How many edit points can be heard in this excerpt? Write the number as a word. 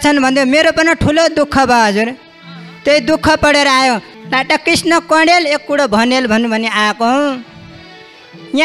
one